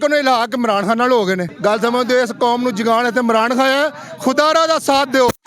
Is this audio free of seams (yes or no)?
no